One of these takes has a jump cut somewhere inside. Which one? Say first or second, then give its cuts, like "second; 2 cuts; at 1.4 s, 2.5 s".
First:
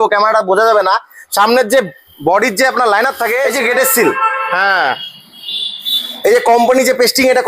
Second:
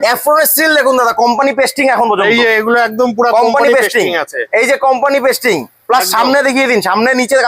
first; 1 cut; at 3.5 s